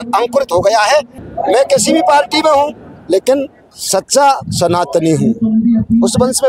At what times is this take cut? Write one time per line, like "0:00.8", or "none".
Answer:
0:01.2

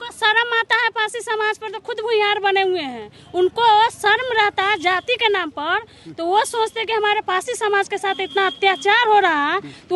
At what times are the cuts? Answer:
none

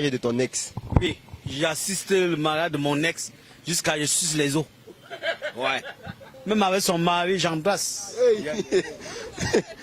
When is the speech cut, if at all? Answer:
0:01.0
0:06.3

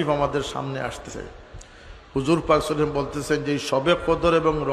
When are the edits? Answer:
0:01.1

